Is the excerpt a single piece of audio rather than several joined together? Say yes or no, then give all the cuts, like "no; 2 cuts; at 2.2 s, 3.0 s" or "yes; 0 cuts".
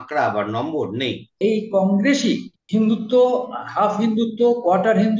no; 1 cut; at 1.4 s